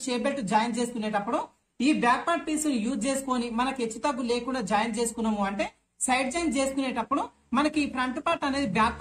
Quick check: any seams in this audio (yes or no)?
no